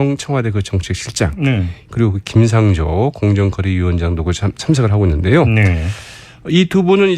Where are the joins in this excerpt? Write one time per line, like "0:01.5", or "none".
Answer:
0:05.1